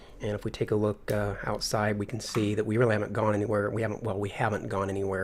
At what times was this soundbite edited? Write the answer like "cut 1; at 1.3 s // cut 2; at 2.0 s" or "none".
none

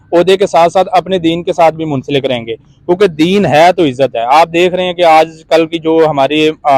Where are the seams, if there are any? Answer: none

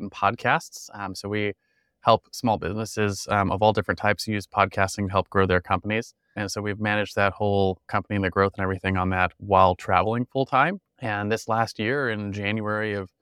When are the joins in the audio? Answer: cut 1; at 6.4 s // cut 2; at 7.8 s // cut 3; at 10.9 s

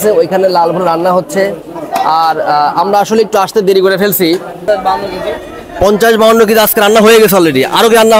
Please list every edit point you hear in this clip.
cut 1; at 4.6 s

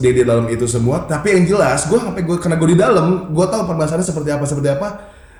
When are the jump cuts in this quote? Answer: none

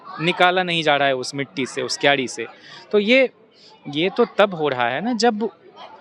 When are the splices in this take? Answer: none

